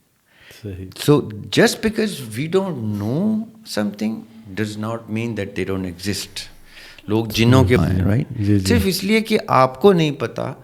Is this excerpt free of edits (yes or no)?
no